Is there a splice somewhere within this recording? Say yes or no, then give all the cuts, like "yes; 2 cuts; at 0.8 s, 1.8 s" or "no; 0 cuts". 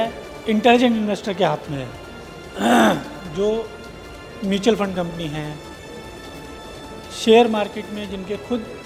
no; 0 cuts